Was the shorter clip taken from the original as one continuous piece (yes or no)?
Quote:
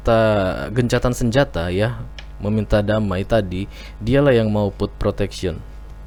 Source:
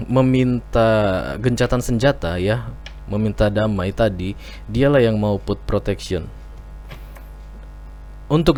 yes